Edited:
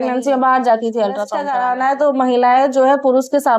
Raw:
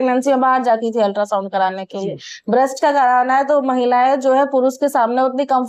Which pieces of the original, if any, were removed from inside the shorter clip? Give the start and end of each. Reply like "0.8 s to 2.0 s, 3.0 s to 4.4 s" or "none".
1.4 s to 2.9 s

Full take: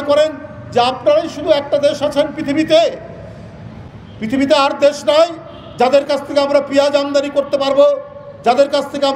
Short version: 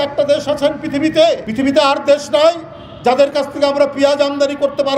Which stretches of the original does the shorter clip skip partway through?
3.0 s to 4.2 s

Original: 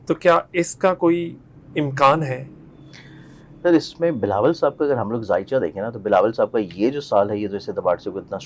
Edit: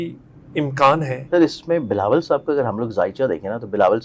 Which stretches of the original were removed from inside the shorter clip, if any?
2.4 s to 3.5 s

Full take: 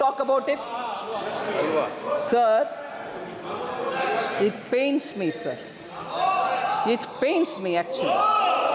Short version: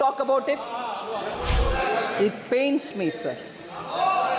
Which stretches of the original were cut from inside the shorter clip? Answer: 1.3 s to 3.5 s

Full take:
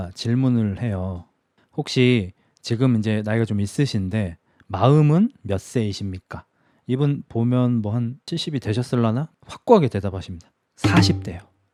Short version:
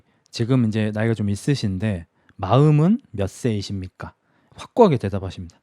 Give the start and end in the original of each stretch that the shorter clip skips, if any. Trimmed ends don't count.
6.7 s to 9.3 s

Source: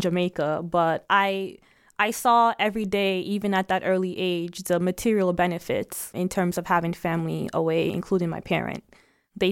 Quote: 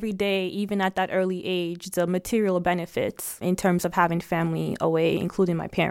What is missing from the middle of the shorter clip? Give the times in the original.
none

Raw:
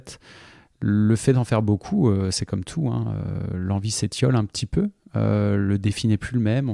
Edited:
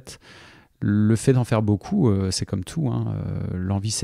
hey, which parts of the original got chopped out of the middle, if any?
none

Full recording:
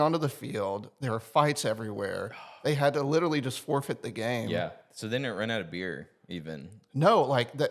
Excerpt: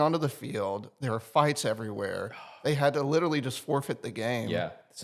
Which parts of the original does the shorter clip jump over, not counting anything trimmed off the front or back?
none

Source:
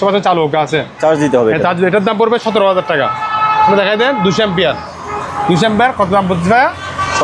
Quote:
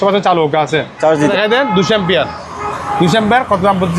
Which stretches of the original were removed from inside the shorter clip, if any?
1.3 s to 3.8 s

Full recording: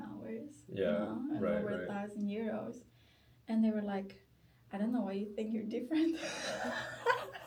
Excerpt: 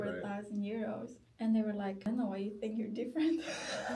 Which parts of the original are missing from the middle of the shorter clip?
2.8 s to 3.3 s, 4.1 s to 4.7 s

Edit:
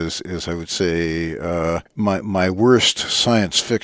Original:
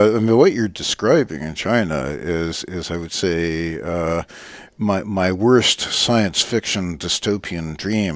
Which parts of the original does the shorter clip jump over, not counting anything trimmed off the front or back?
4.3 s to 4.7 s

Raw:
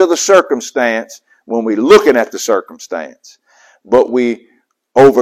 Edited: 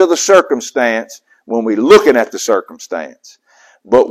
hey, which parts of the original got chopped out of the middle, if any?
none

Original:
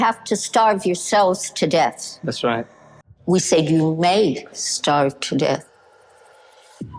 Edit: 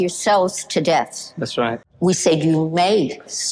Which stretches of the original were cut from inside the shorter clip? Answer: 2.7 s to 3.1 s

